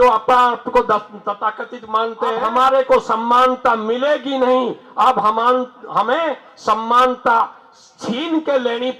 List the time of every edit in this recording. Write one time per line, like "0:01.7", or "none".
0:02.4